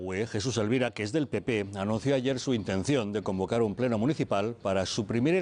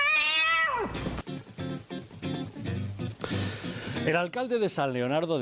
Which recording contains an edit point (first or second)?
first